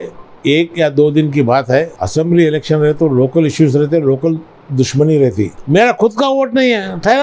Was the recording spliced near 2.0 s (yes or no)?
yes